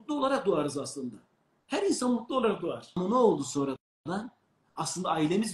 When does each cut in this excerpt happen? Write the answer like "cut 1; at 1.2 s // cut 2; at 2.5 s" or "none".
cut 1; at 2.9 s